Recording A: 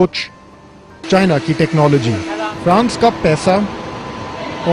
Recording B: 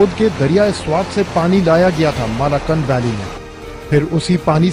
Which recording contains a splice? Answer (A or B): A